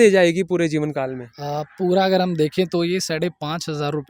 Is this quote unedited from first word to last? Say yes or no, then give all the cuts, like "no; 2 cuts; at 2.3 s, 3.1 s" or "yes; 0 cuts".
yes; 0 cuts